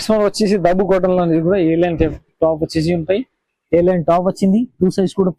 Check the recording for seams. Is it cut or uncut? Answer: uncut